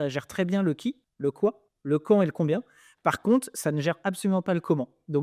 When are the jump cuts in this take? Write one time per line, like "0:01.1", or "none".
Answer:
0:01.1
0:01.7